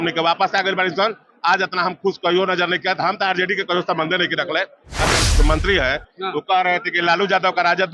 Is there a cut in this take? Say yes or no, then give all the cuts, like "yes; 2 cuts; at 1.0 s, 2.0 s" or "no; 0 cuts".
yes; 1 cut; at 5.1 s